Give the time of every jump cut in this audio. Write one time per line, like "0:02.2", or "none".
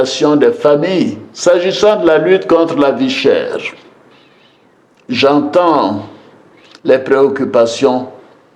0:01.2